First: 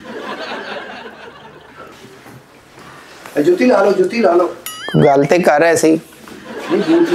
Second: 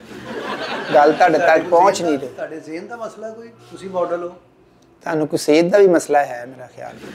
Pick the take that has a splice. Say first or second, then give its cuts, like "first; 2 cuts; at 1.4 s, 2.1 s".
first; 1 cut; at 1.8 s